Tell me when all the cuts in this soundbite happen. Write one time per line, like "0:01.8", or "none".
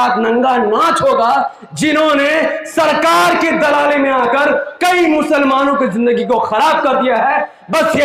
none